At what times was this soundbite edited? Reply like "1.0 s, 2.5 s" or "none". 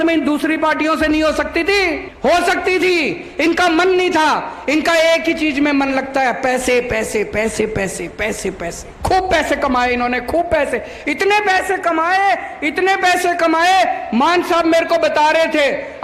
2.1 s, 8.8 s